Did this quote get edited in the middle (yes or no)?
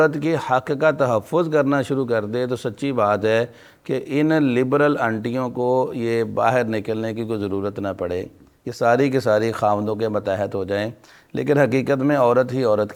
no